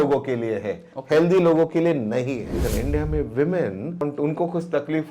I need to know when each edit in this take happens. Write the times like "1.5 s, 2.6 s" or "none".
2.6 s, 4.0 s

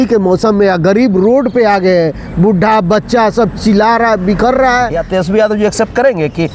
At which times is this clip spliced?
5.0 s

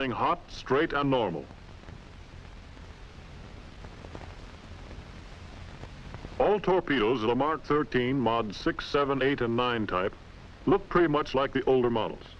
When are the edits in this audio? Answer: 8.5 s

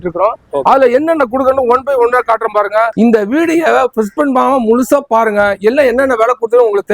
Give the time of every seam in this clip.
2.9 s

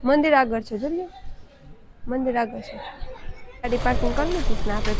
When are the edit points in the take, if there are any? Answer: 3.5 s

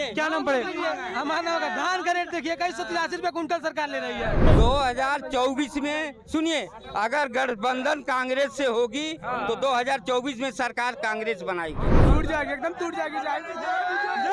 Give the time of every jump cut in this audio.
4.4 s, 12.0 s

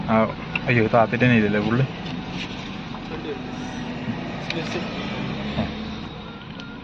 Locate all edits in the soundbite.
none

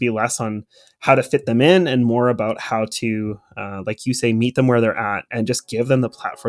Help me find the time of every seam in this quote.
5.3 s

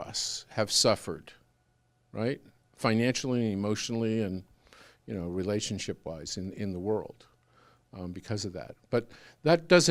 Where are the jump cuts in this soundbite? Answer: none

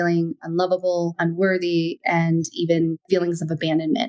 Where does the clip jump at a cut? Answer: 1.1 s, 3.0 s

